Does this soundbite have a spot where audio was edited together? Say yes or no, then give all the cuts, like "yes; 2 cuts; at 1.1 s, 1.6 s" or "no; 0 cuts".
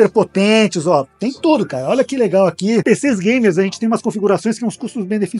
yes; 1 cut; at 2.8 s